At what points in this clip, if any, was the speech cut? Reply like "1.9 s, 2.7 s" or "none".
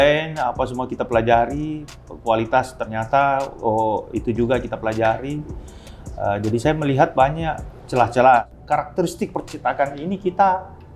8.5 s